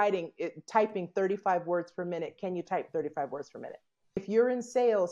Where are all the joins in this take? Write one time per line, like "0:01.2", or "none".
0:04.2